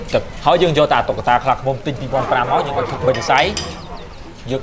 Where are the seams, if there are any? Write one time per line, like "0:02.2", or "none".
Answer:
none